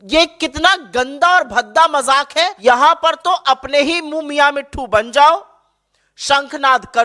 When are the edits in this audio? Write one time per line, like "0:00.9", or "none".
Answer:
0:02.6